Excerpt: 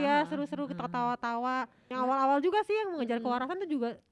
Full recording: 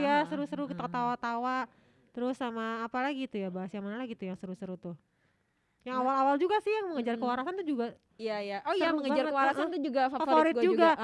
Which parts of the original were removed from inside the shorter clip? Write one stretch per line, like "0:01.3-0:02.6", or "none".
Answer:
0:01.8-0:05.8